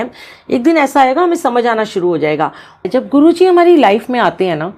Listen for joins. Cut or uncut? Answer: cut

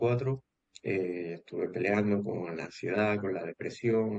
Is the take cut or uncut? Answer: uncut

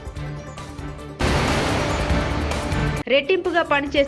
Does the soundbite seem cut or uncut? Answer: cut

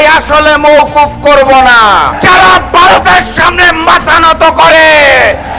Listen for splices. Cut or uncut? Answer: cut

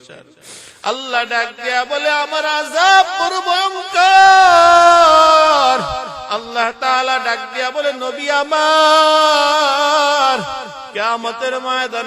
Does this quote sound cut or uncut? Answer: uncut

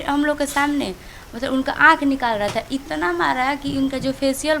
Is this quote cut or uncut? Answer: uncut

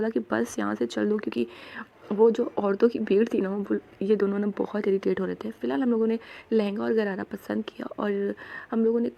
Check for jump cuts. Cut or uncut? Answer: uncut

